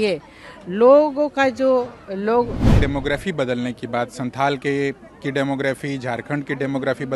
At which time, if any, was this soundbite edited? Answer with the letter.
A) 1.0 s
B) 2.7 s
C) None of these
B